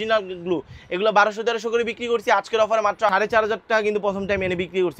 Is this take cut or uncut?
cut